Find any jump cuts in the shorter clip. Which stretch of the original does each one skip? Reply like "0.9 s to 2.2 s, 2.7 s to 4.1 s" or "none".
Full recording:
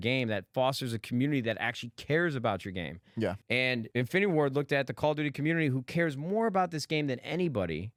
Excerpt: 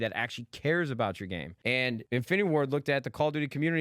3.4 s to 3.8 s